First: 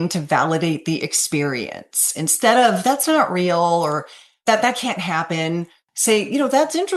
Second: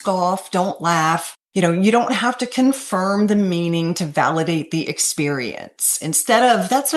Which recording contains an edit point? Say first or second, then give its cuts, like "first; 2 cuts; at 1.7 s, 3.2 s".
second; 1 cut; at 1.4 s